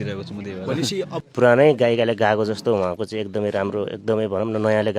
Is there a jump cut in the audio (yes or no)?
yes